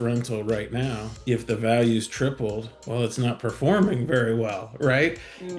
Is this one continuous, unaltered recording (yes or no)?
no